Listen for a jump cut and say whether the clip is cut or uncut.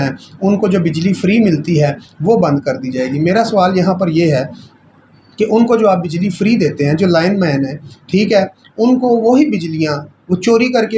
uncut